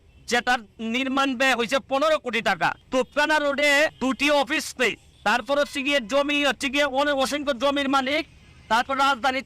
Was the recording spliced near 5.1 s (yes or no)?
yes